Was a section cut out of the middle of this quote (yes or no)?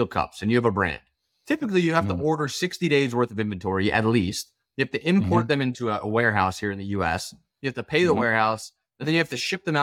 no